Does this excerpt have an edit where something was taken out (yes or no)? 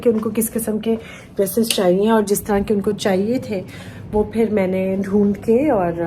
no